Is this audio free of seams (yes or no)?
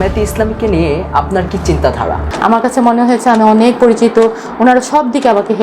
no